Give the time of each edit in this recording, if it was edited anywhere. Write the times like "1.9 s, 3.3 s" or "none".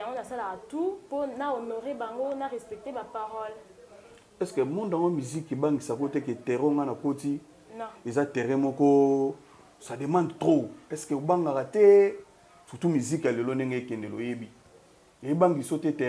none